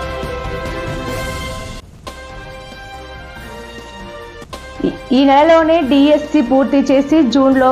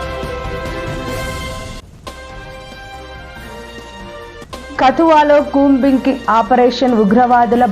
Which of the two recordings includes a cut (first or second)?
second